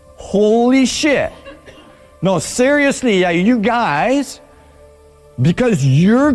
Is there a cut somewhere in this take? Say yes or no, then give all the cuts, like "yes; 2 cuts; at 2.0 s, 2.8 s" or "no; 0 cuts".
no; 0 cuts